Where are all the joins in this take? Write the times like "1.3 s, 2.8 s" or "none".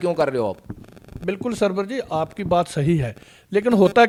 none